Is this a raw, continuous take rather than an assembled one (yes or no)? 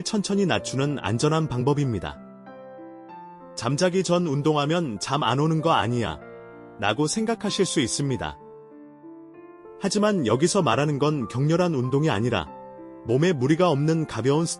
yes